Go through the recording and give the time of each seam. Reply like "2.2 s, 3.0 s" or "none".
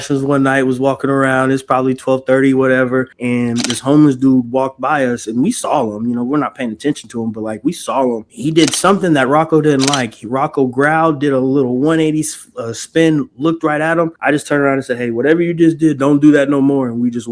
3.2 s, 8.3 s, 14.2 s